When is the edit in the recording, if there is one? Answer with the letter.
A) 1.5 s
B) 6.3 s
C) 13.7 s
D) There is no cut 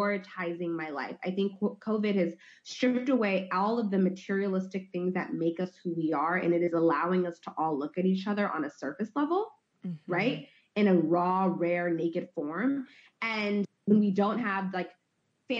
C